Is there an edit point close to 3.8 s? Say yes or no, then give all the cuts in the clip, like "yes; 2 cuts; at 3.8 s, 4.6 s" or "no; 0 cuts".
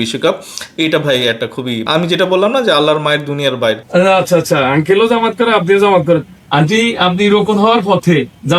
yes; 1 cut; at 3.8 s